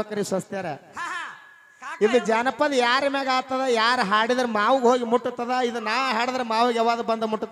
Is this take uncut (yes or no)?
yes